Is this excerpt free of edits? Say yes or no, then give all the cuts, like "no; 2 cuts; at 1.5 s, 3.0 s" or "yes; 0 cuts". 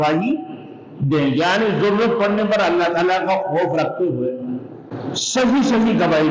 no; 1 cut; at 4.9 s